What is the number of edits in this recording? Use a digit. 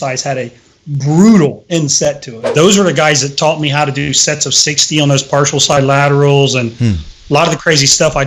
1